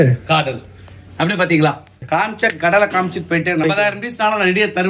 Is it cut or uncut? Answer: cut